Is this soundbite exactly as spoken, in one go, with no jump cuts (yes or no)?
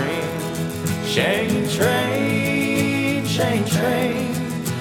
yes